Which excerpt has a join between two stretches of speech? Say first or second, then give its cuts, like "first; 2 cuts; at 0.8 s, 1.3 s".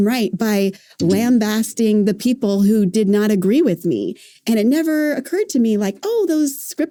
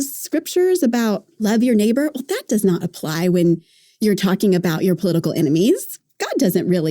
second; 3 cuts; at 1.4 s, 3.8 s, 5.9 s